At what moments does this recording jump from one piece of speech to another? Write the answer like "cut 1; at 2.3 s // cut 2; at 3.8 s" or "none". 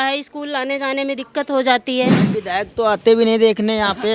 cut 1; at 2.2 s